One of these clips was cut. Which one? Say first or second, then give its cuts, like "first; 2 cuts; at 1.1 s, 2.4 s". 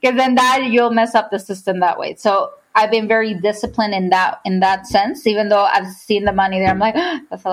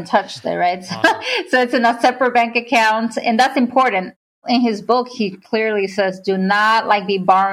second; 1 cut; at 4.4 s